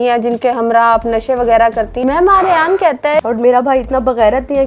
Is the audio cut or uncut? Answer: cut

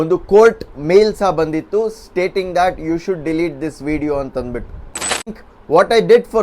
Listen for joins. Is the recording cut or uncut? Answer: cut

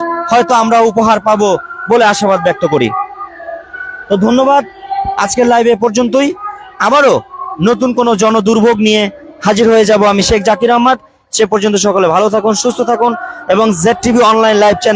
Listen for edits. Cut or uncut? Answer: uncut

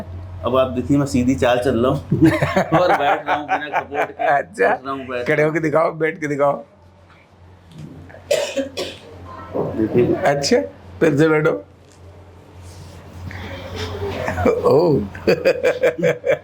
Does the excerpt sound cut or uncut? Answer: uncut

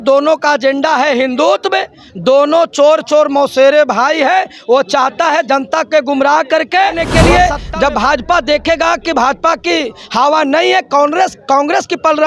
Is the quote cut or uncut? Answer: cut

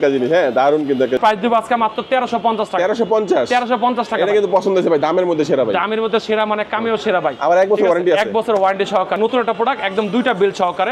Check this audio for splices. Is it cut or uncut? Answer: cut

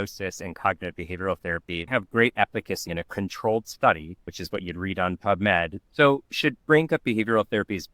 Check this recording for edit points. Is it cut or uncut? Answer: cut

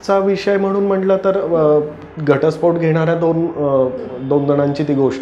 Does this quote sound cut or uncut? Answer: uncut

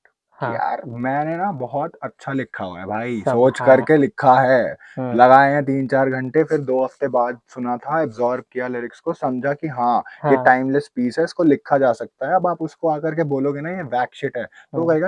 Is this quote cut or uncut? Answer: uncut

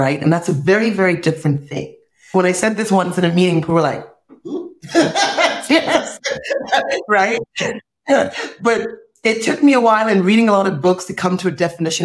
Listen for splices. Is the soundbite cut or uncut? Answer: cut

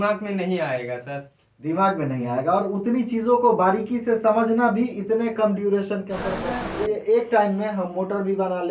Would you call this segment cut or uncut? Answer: cut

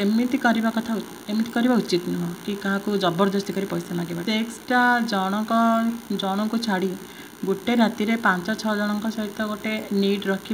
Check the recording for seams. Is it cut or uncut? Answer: cut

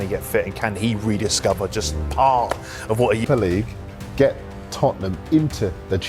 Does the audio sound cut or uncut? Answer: cut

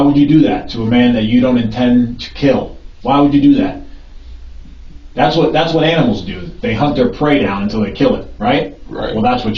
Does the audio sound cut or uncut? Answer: uncut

